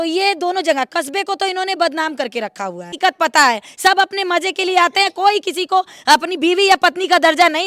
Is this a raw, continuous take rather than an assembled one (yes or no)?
no